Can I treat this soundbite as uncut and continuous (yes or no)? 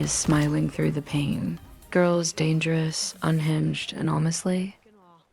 no